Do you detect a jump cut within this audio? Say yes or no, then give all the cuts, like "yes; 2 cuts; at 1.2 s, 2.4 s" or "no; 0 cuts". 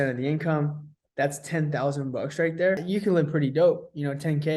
yes; 1 cut; at 2.8 s